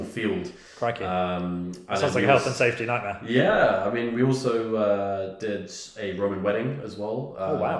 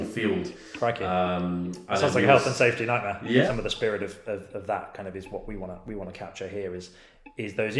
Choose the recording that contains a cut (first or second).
second